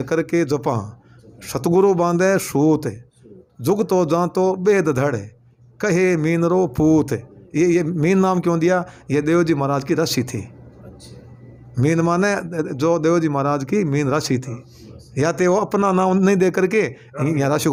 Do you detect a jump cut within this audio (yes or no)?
no